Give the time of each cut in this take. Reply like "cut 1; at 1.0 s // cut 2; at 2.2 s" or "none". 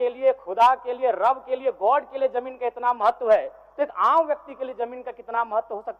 none